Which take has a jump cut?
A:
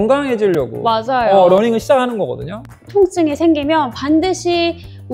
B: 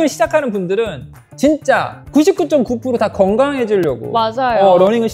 A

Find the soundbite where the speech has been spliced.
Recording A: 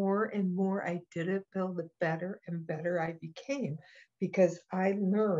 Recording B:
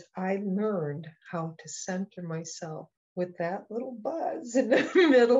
B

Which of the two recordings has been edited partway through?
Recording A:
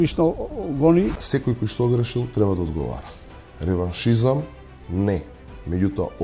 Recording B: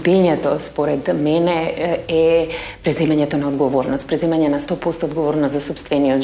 A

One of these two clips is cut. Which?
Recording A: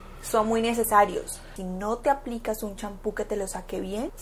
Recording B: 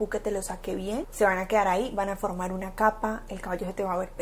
A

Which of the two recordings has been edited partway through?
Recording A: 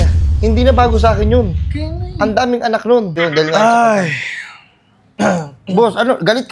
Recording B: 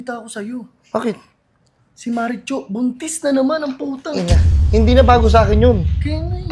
A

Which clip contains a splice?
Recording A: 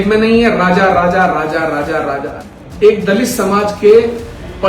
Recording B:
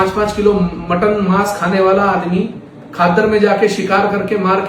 A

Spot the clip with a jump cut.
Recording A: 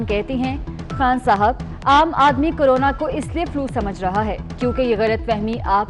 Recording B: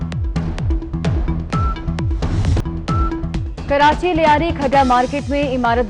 B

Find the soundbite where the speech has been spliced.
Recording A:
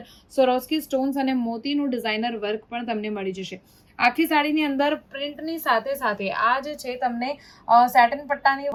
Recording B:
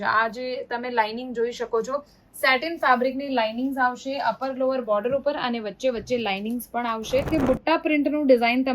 B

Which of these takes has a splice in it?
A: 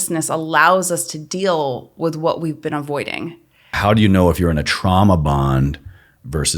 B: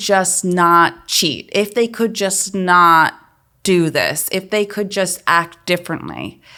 A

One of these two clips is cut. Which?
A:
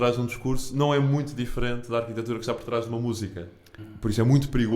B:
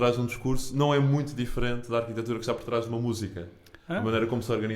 A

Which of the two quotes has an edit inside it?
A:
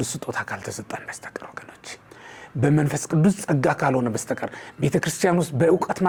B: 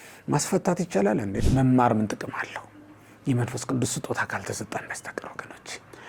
B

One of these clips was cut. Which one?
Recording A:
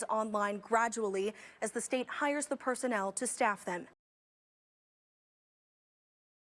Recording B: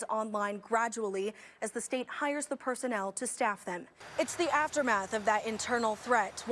B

